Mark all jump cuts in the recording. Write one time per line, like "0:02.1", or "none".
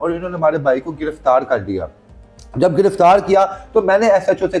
none